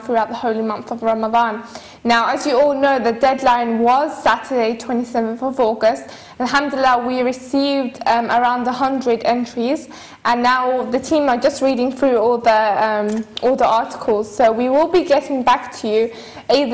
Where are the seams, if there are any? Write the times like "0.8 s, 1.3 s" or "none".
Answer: 11.2 s